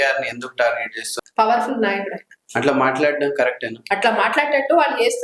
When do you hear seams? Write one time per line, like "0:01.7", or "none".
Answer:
0:01.1
0:03.8